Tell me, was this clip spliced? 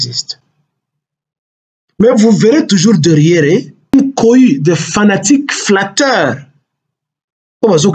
yes; 1 cut; at 3.9 s

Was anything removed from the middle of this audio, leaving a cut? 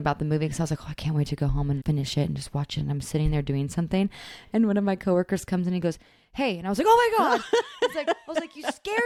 no; 0 cuts

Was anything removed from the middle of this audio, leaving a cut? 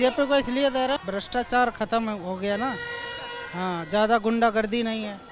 yes; 1 cut; at 1.0 s

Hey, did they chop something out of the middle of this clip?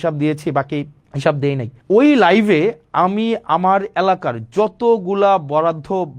yes; 2 cuts; at 1.0 s, 1.7 s

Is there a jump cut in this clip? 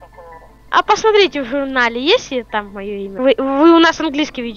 yes; 1 cut; at 3.1 s

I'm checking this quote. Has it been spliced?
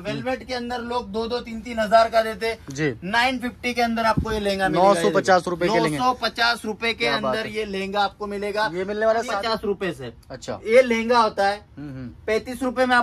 yes; 1 cut; at 9.3 s

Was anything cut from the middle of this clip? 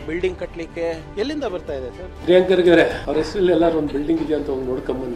yes; 3 cuts; at 1.0 s, 2.1 s, 3.0 s

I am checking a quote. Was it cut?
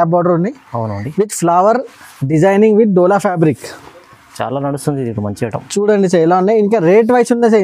no; 0 cuts

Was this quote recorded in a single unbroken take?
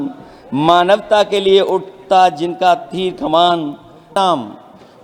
no; 1 cut; at 4.1 s

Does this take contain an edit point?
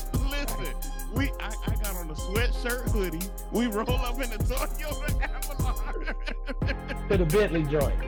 no; 0 cuts

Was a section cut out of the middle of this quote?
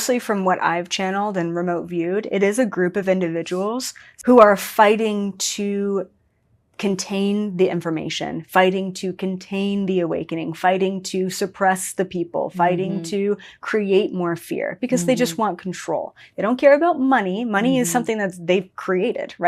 no; 0 cuts

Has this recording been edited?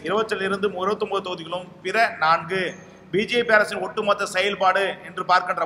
no; 0 cuts

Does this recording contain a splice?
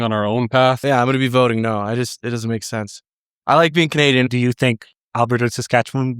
yes; 2 cuts; at 0.8 s, 4.3 s

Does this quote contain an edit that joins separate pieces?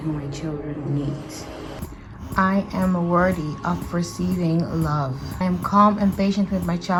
no; 0 cuts

